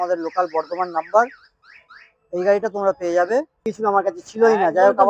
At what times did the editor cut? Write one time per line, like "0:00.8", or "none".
0:03.7